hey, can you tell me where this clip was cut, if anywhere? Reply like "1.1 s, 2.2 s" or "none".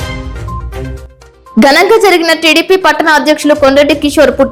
none